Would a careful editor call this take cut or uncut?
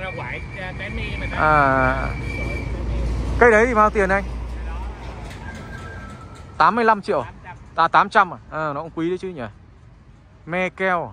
uncut